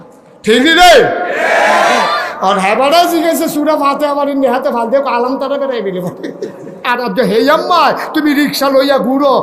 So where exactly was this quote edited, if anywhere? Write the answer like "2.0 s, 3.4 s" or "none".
6.8 s